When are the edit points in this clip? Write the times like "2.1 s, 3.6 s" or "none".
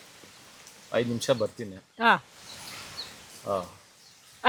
none